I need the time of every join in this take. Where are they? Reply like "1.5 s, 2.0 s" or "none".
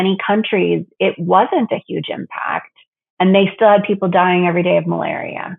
none